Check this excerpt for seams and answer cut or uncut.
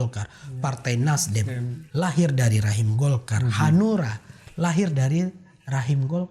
uncut